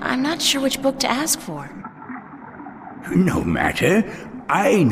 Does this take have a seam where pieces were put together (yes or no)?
yes